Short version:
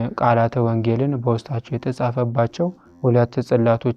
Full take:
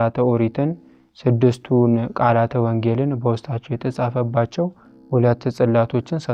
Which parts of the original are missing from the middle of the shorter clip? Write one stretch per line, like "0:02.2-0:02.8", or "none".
0:04.8-0:04.9